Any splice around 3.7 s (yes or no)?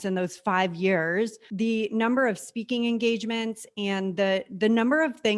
no